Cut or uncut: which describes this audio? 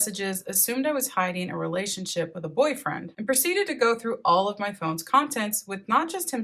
cut